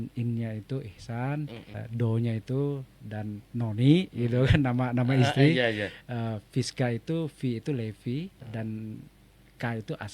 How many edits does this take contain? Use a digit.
2